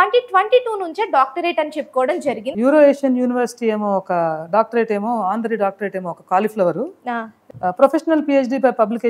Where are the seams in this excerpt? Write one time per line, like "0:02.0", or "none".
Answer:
0:02.5
0:07.4